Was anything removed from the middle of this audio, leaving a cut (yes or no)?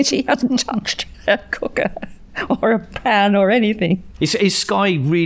no